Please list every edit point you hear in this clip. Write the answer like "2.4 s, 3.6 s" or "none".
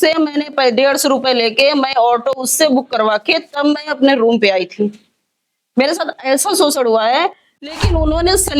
7.7 s